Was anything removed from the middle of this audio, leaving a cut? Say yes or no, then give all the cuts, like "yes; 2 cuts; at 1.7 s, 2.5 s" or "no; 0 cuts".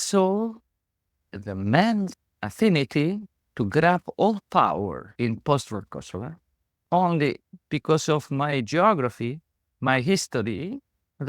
yes; 2 cuts; at 2.2 s, 7.5 s